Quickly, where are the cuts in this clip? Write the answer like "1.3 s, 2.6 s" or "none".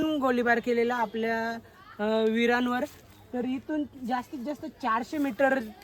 none